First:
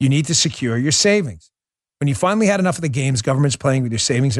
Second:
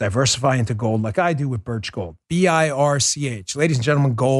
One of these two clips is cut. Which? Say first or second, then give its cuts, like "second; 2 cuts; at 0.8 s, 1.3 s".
second; 1 cut; at 2.2 s